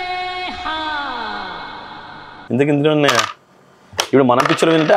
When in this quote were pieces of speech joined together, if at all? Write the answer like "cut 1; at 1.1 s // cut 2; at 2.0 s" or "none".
cut 1; at 2.4 s